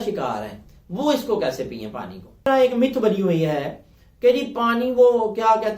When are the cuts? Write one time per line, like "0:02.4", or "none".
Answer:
0:02.5